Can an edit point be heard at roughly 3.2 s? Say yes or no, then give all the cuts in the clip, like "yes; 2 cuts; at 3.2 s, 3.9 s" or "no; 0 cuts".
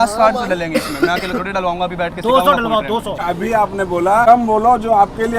yes; 2 cuts; at 3.2 s, 4.2 s